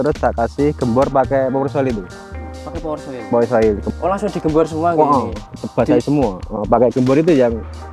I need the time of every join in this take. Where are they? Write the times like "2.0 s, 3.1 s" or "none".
3.9 s